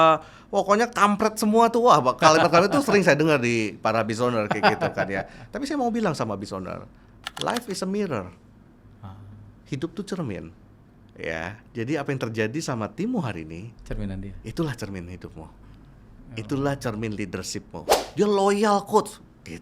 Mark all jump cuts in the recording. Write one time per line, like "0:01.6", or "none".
0:18.1